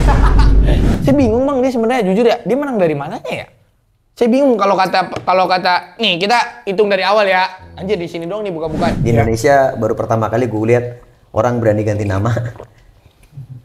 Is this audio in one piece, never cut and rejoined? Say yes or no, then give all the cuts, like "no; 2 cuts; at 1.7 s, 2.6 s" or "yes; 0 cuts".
no; 2 cuts; at 0.9 s, 8.9 s